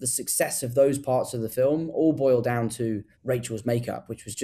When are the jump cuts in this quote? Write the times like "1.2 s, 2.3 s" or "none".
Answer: 3.1 s